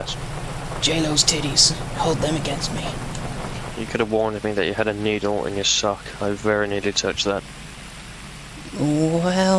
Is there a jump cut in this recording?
yes; 1 cut; at 3.7 s

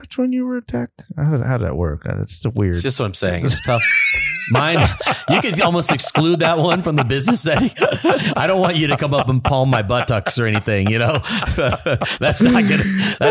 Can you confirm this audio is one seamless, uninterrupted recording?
yes; 0 cuts

